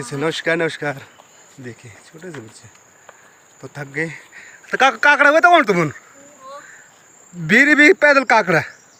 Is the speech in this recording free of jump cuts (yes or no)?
yes